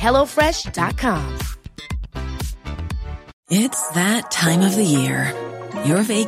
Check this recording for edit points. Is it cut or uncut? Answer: cut